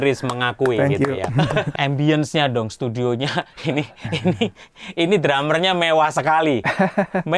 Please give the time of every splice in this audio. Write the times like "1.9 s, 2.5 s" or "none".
1.7 s